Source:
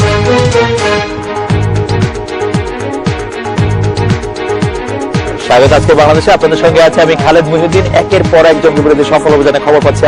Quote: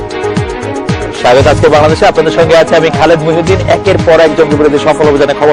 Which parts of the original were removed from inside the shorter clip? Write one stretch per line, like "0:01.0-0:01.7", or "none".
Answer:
0:03.2-0:05.2